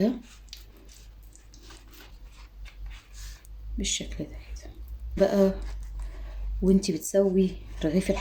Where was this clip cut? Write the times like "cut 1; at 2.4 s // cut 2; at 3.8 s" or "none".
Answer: cut 1; at 1.8 s // cut 2; at 5.2 s